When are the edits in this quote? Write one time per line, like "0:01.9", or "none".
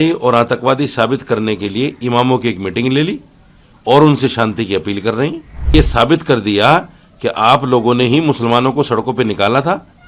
0:05.7